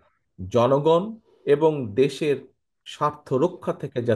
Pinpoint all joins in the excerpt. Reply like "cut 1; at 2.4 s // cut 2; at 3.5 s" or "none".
none